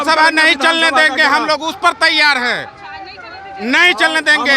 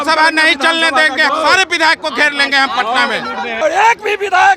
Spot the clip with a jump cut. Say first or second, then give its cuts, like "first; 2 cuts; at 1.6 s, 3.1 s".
second; 2 cuts; at 1.3 s, 3.6 s